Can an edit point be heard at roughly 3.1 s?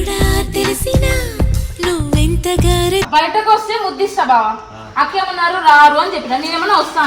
yes; 1 cut; at 3.1 s

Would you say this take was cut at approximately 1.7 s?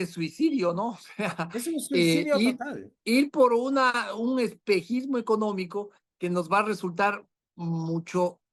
no; 0 cuts

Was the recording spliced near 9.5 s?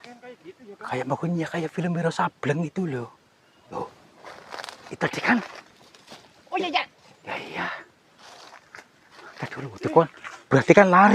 no; 1 cut; at 3.7 s

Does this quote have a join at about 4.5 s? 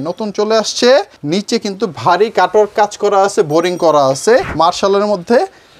yes; 2 cuts; at 1.2 s, 4.5 s

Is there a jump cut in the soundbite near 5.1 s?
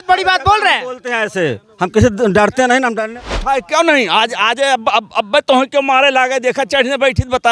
no; 1 cut; at 3.2 s

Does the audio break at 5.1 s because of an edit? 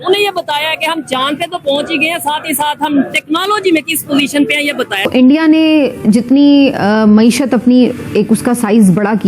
yes; 1 cut; at 5.1 s

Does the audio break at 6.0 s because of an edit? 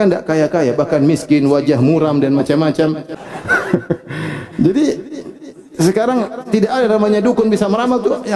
no; 1 cut; at 3.0 s

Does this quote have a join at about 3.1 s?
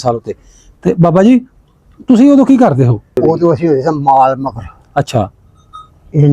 yes; 1 cut; at 3.1 s

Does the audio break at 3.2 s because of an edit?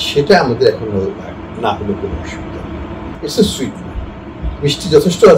yes; 1 cut; at 3.2 s

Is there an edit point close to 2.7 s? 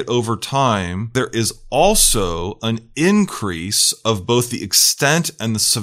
no; 1 cut; at 1.1 s

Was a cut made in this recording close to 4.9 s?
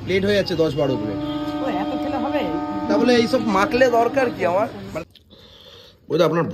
yes; 1 cut; at 4.9 s

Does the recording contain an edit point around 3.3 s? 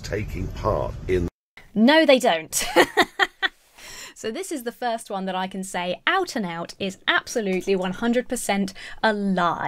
no; 0 cuts

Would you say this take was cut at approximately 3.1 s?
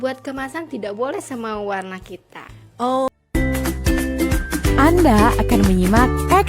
yes; 1 cut; at 3.1 s

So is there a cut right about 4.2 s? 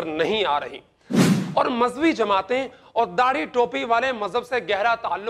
no; 1 cut; at 1.2 s

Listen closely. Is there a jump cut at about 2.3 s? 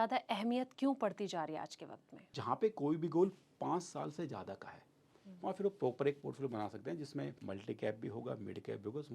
yes; 2 cuts; at 2.3 s, 7.4 s

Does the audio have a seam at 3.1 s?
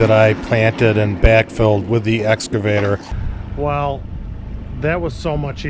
yes; 1 cut; at 3.1 s

